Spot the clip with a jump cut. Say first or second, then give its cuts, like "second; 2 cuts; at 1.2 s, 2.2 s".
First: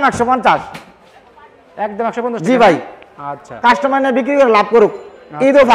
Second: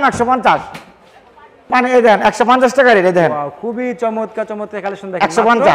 second; 1 cut; at 1.7 s